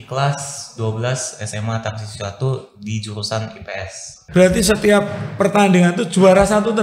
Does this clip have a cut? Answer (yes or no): yes